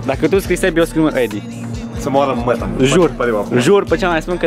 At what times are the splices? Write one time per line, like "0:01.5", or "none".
none